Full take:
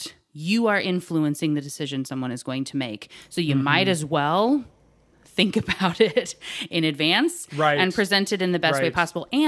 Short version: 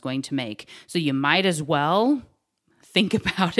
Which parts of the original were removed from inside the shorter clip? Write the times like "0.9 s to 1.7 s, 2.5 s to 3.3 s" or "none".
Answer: none